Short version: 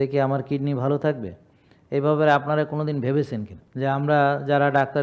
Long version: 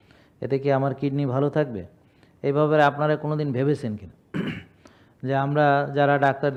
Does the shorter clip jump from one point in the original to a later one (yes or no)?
yes